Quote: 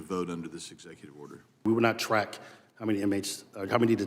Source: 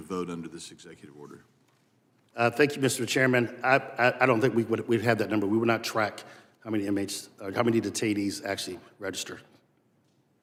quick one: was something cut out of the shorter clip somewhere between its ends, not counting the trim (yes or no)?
yes